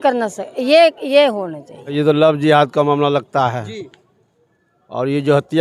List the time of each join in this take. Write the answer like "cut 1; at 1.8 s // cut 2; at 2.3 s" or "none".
cut 1; at 1.9 s